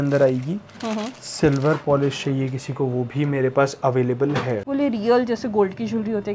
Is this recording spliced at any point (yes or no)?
yes